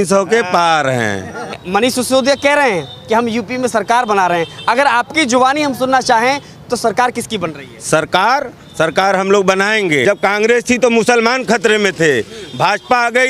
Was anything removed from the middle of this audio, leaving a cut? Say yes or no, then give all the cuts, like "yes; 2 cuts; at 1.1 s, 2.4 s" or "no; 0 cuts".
yes; 2 cuts; at 1.6 s, 10.0 s